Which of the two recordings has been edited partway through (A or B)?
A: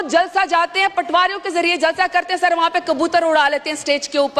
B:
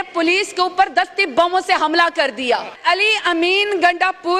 B